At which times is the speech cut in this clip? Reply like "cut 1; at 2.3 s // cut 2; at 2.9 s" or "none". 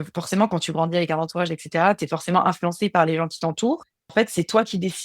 cut 1; at 4.1 s